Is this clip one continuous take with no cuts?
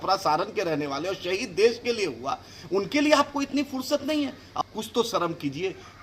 no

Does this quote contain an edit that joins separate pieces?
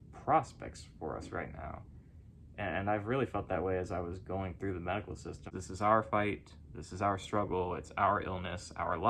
yes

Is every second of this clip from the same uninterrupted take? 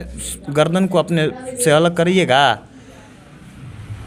yes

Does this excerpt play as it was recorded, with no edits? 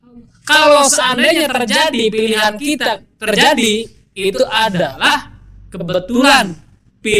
yes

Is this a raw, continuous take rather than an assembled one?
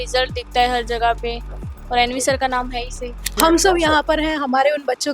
no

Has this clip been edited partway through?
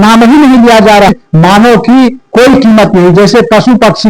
yes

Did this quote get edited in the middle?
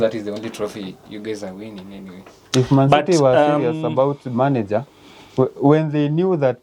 no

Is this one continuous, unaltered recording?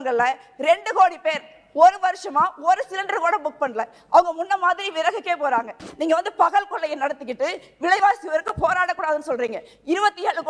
no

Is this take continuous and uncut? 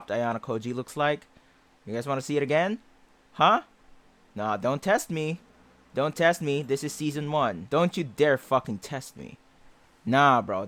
yes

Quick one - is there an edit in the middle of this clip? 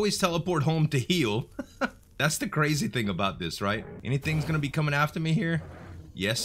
yes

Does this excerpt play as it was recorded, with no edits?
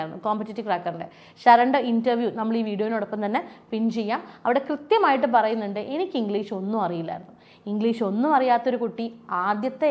yes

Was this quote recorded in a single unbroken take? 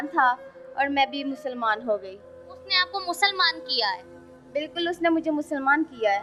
yes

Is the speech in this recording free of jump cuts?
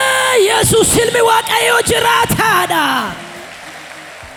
yes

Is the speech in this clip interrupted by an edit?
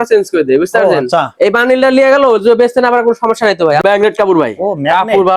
yes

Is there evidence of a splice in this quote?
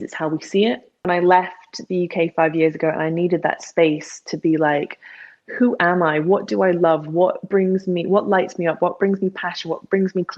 yes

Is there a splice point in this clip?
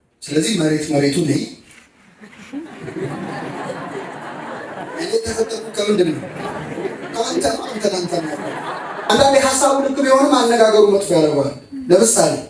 yes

